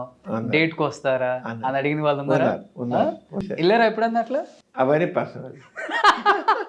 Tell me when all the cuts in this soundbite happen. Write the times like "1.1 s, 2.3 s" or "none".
3.4 s, 4.6 s